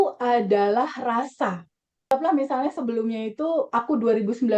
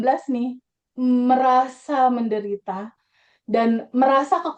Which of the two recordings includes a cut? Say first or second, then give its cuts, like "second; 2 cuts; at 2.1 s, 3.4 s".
first; 1 cut; at 2.1 s